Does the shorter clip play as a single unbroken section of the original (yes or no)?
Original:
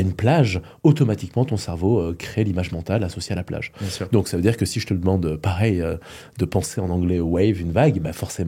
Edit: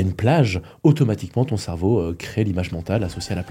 yes